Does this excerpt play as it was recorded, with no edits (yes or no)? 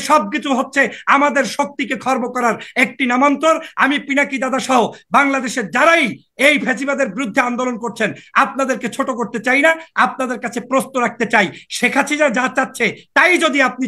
yes